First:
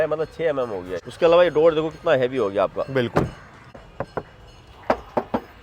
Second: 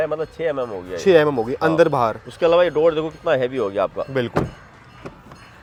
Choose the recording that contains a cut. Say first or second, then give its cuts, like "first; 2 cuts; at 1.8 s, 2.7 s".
first; 2 cuts; at 1.0 s, 3.6 s